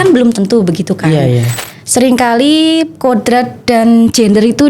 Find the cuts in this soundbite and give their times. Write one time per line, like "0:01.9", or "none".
0:01.5